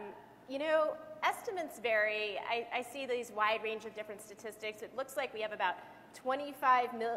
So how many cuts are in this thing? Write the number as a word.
one